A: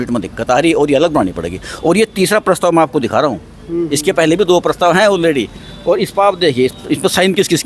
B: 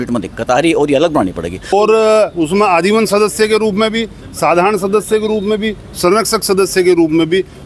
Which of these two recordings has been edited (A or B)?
B